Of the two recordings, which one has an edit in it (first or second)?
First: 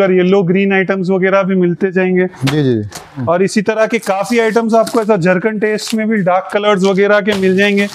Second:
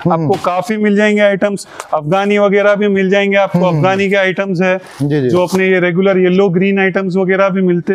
first